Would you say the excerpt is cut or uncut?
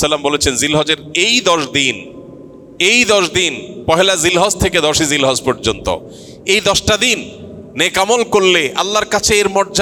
uncut